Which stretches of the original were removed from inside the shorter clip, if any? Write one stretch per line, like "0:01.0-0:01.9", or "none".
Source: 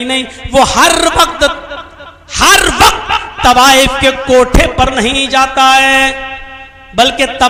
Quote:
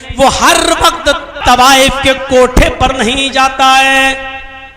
0:01.7-0:03.3